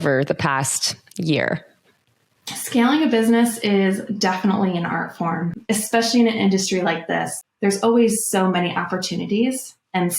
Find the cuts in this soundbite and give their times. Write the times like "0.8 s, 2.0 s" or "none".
5.6 s, 7.4 s